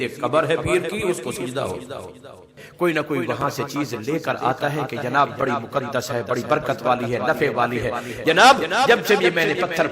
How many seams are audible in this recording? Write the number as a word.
one